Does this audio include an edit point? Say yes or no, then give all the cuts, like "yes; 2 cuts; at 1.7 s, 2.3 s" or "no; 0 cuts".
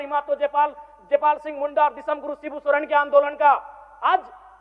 no; 0 cuts